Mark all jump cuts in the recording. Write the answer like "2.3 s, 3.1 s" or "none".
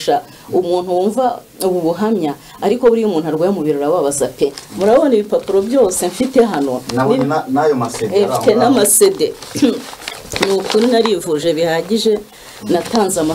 none